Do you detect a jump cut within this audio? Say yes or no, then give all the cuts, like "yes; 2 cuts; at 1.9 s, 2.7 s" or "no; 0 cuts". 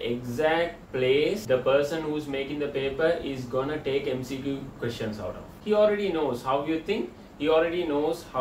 yes; 2 cuts; at 1.4 s, 5.5 s